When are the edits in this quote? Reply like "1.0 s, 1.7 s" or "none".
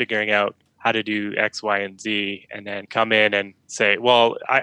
2.8 s, 3.6 s